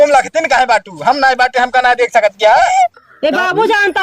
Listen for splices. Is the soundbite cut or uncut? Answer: cut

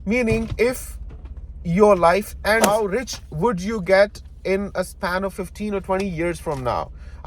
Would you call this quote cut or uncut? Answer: cut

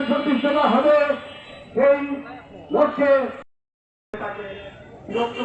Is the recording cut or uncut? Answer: cut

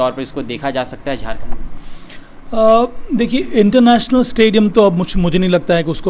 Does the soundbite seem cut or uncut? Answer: uncut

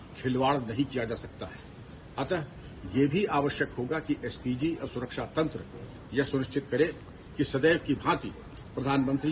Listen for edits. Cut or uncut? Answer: uncut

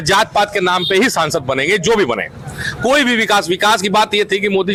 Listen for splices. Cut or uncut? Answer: uncut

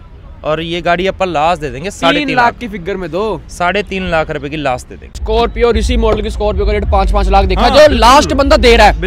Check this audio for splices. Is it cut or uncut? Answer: cut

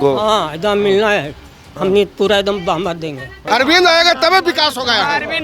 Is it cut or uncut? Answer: cut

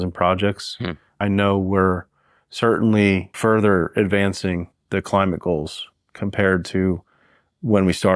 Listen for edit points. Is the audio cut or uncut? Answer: cut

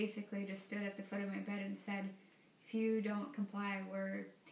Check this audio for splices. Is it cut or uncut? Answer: uncut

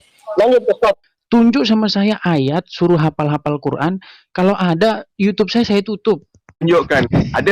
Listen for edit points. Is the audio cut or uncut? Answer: cut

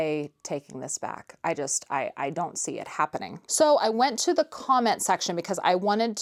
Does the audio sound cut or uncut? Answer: uncut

